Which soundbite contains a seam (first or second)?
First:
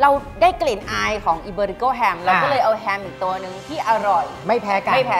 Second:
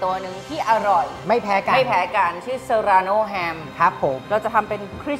second